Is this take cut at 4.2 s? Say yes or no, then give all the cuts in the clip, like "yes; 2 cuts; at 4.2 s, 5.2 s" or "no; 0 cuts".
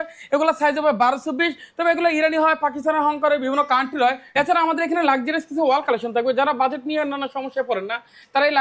yes; 1 cut; at 4.2 s